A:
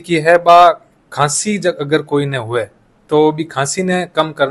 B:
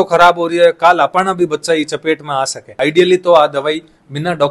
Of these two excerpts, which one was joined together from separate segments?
B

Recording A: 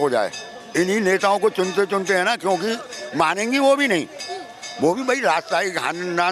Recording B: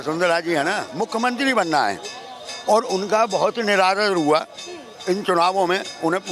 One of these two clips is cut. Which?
B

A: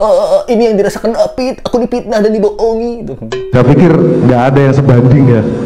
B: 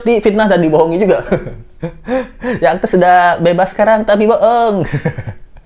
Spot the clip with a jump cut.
A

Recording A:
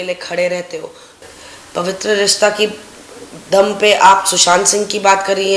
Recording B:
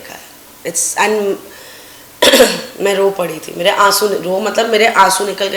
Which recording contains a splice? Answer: A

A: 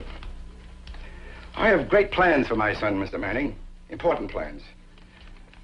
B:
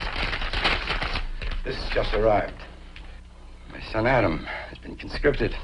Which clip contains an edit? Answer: A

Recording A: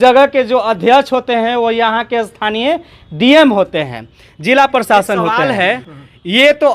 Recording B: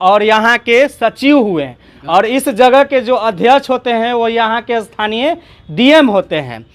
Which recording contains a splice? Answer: A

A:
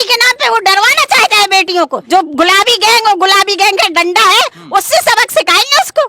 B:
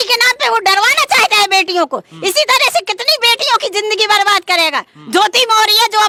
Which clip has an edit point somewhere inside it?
A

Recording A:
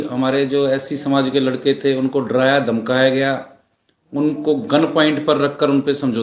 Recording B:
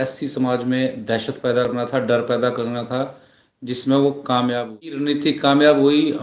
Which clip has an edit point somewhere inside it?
B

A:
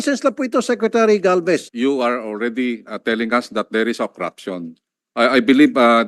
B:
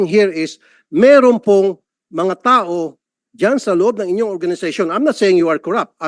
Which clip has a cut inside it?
A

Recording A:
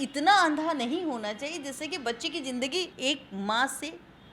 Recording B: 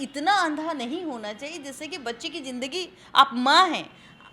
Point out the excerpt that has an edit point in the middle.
A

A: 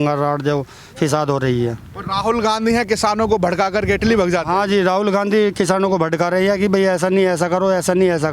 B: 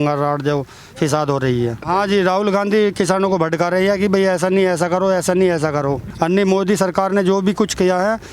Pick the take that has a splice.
B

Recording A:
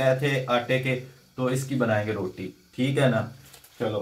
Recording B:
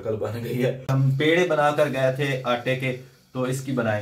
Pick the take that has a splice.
B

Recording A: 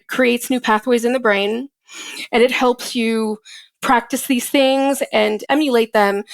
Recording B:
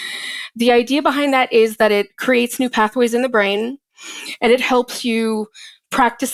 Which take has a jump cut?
A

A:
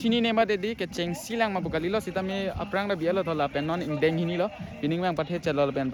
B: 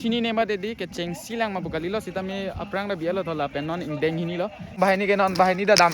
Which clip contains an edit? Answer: B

